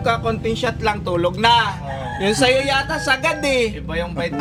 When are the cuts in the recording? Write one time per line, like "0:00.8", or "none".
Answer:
none